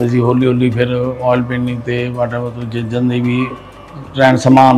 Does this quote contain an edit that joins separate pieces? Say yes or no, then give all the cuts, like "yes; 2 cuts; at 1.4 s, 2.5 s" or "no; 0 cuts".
no; 0 cuts